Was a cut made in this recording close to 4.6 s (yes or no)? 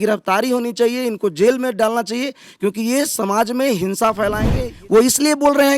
yes